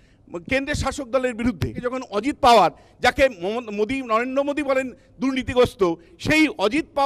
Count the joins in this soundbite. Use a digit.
1